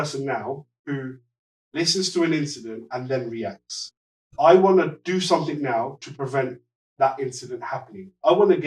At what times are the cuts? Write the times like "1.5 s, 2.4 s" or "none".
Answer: none